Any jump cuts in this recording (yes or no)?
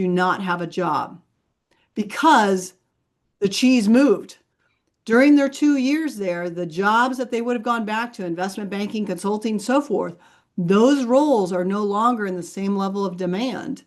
no